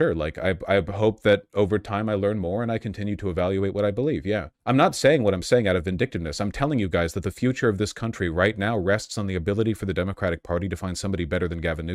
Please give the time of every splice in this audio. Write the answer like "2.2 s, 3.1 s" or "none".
none

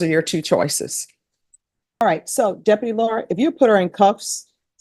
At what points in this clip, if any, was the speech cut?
2.0 s

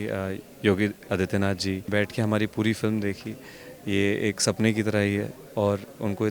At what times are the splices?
1.9 s

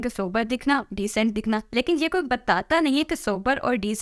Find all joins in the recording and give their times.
none

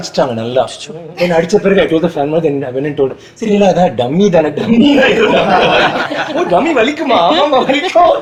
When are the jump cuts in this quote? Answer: none

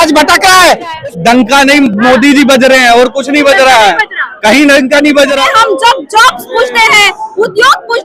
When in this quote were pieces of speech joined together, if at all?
1.0 s, 5.4 s

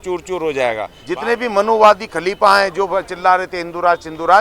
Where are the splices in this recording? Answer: 0.9 s

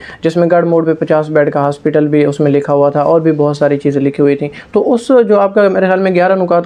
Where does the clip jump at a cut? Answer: none

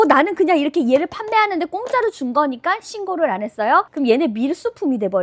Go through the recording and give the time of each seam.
none

